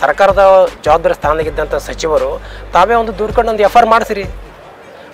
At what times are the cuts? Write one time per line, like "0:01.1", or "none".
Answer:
none